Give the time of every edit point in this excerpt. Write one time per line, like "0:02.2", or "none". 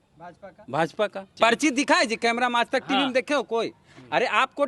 0:01.3